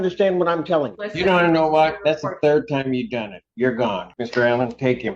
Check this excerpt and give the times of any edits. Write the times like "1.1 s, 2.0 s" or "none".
1.0 s, 4.1 s

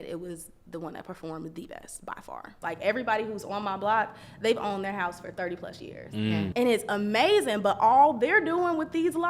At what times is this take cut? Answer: 2.6 s, 6.5 s

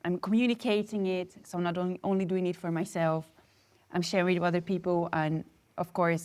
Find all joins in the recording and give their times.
none

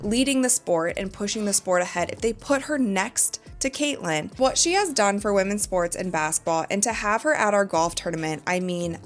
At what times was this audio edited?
4.3 s

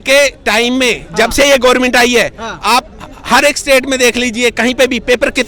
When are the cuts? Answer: none

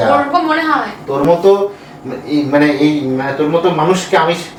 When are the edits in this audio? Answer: none

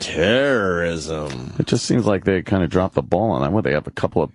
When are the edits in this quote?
none

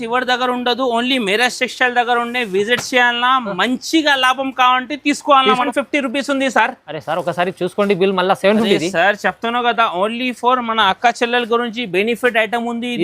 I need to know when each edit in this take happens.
5.6 s

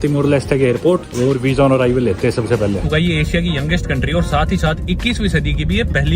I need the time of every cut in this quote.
1.1 s, 2.8 s

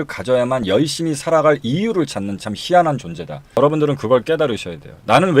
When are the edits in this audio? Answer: 3.6 s

